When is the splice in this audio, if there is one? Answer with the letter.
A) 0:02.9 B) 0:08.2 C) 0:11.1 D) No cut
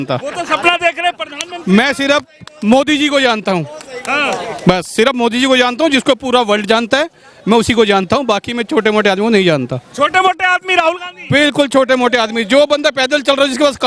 D